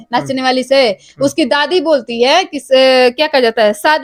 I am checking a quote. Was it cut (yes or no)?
no